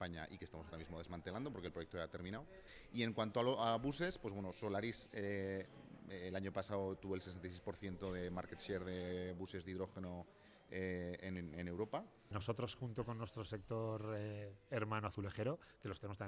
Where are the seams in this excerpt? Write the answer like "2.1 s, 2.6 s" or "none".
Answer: 2.7 s, 12.3 s